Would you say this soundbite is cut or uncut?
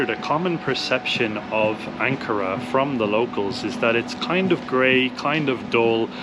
uncut